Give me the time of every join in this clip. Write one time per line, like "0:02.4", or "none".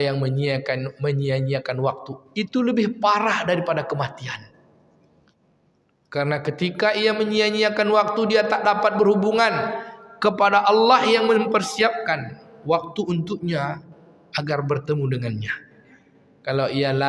none